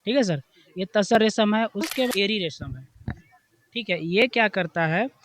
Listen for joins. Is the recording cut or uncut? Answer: cut